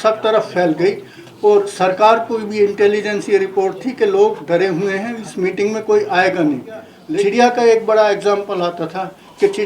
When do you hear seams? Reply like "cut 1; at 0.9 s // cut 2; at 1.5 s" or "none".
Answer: cut 1; at 7.0 s